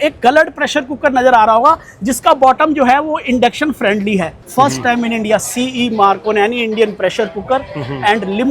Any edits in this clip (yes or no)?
yes